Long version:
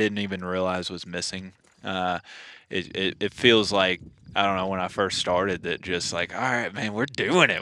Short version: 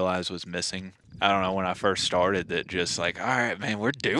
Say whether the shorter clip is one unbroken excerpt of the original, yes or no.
no